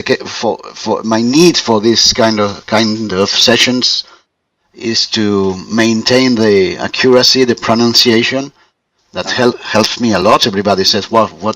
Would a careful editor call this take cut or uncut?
cut